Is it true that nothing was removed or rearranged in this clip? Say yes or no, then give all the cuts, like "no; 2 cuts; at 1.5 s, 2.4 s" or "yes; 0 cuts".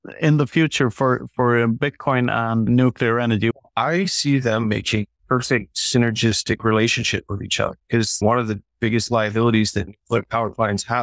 no; 4 cuts; at 2.7 s, 3.5 s, 5.6 s, 8.2 s